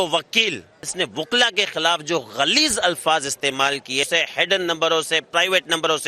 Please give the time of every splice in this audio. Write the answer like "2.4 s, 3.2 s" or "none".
0.9 s, 4.1 s